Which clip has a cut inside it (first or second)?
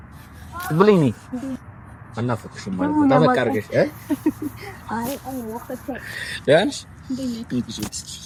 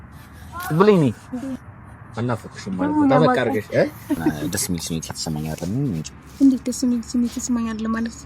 second